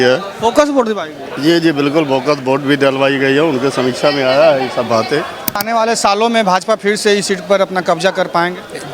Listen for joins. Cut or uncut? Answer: cut